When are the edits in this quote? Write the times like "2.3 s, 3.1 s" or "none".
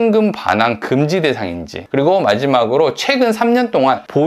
1.7 s